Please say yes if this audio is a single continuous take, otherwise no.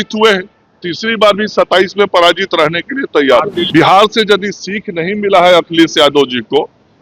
no